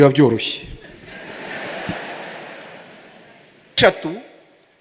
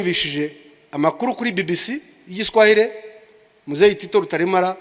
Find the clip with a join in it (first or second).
first